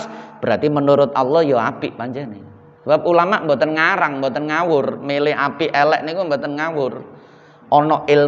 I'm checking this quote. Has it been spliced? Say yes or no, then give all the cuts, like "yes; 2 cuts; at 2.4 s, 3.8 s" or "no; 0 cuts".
no; 0 cuts